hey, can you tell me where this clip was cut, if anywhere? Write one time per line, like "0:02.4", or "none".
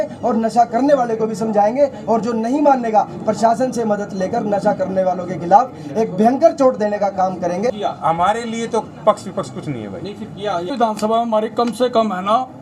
0:07.7
0:10.7